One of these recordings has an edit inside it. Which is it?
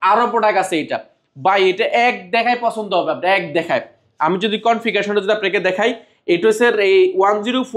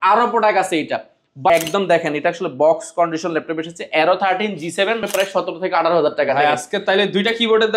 second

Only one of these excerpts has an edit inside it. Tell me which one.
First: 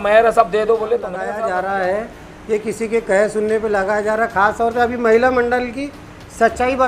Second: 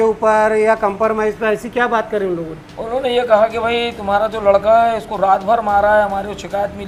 first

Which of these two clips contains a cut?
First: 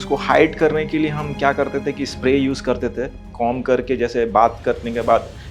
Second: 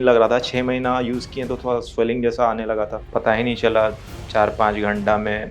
second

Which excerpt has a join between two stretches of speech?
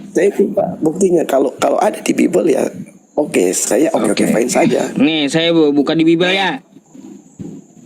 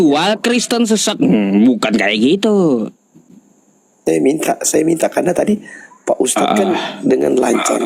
first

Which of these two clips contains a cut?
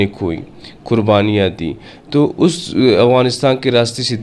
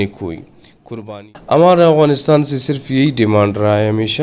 second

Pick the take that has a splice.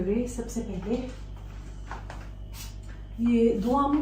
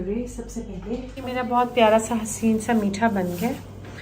second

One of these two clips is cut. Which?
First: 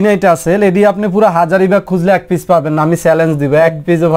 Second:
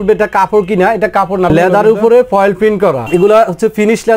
second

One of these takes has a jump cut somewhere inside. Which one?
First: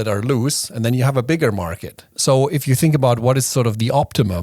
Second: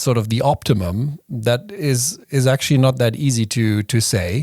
first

